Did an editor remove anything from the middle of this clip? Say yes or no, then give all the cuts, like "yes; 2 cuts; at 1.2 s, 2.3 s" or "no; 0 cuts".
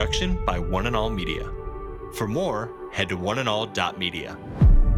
no; 0 cuts